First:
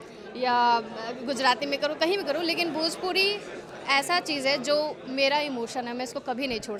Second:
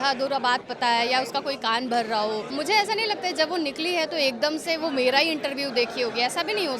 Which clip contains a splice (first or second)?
second